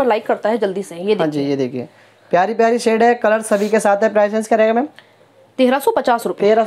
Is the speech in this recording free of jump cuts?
yes; 0 cuts

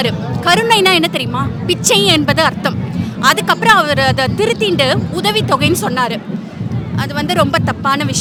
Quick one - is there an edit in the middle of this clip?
no; 0 cuts

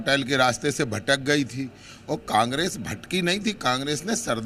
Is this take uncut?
yes; 0 cuts

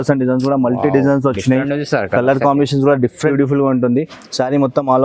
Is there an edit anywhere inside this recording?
yes; 1 cut; at 3.3 s

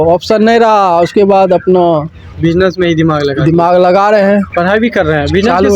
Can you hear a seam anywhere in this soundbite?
yes; 1 cut; at 4.5 s

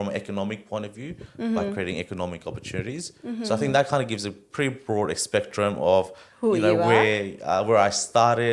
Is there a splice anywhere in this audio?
no; 0 cuts

